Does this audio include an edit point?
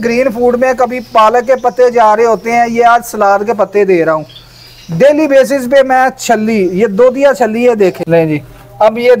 yes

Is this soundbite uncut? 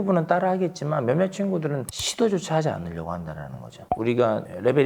no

